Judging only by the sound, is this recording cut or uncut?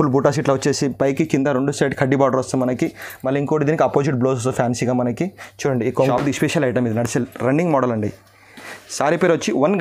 cut